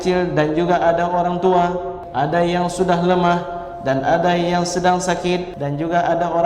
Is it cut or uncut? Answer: cut